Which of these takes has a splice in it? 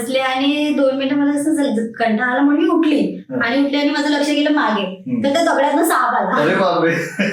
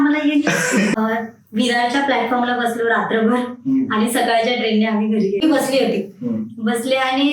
second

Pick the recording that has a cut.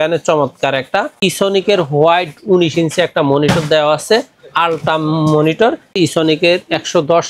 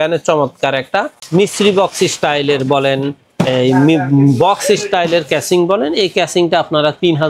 first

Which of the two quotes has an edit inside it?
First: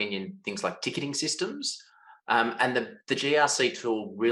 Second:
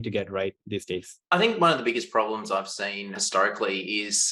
second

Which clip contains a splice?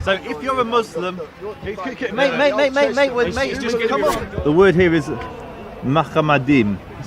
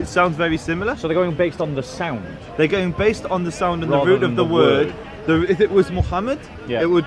first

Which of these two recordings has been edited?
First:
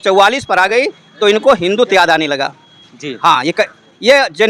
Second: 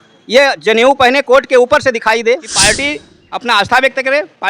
second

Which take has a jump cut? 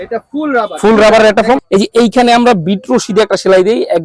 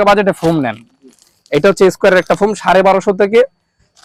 first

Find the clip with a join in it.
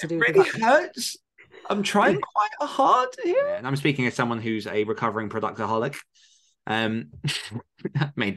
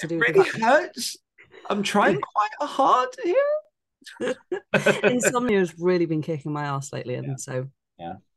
first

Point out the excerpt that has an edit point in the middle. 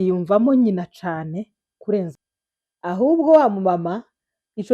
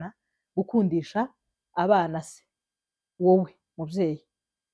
first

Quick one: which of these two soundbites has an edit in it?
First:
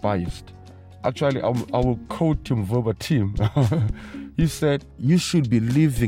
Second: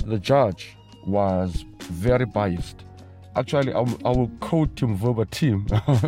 first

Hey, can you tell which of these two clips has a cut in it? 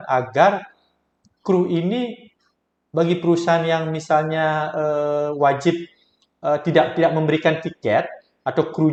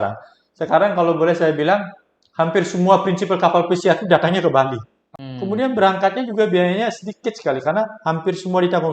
second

